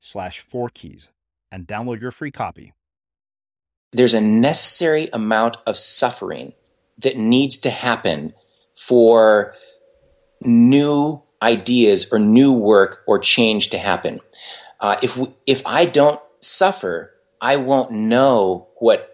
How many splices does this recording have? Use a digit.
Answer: 1